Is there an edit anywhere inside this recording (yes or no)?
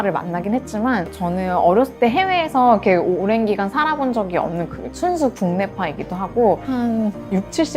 yes